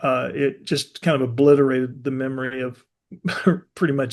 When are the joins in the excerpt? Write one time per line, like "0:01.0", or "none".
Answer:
none